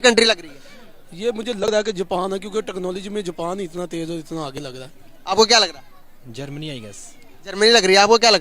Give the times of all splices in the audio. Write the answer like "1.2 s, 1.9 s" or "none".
1.6 s